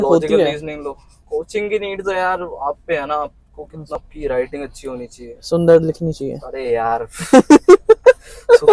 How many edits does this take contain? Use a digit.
1